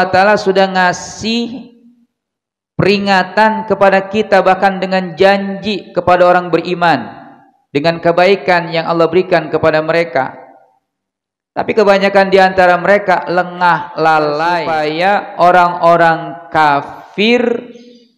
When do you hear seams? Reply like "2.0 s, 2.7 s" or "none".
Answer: 14.8 s

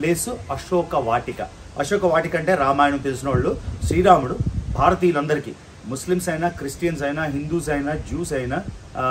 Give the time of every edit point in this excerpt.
none

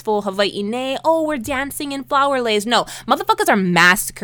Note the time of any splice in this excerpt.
none

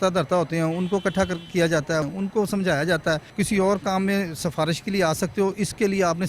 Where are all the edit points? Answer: 2.1 s, 3.4 s

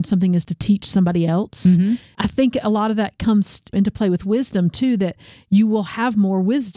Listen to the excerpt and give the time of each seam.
2.1 s, 3.7 s

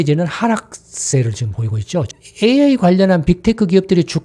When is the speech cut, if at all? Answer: 2.1 s

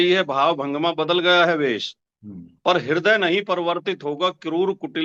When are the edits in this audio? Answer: none

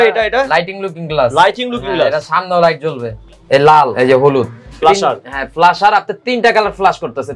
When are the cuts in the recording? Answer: 3.2 s, 4.8 s

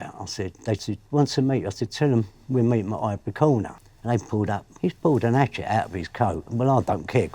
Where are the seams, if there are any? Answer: 4.6 s

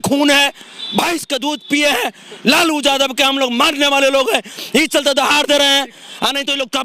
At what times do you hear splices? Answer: none

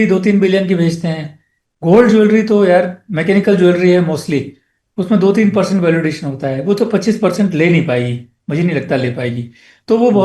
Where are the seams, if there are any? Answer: none

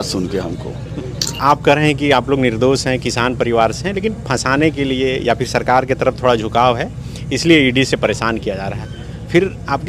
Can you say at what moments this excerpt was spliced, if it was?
1.4 s

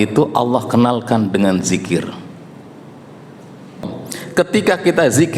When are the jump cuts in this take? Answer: 3.9 s

